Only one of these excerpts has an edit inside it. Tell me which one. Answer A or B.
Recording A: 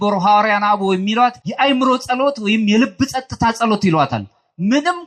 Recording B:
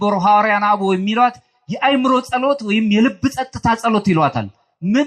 A